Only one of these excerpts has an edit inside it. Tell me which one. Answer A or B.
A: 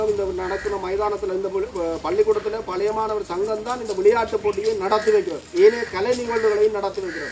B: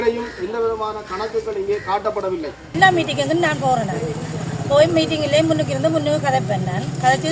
B